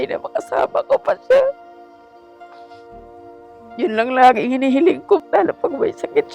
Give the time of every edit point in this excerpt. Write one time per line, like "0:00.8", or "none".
0:05.2